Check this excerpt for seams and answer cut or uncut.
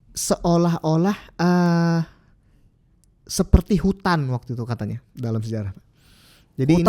uncut